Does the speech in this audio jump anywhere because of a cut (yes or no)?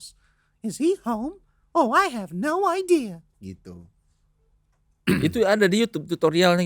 no